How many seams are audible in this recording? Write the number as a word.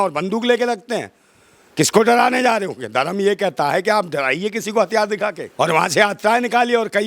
one